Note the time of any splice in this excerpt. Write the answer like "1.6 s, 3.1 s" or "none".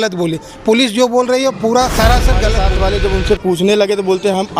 2.6 s